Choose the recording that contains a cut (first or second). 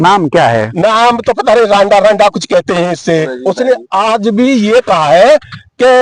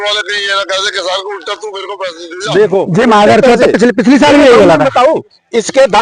first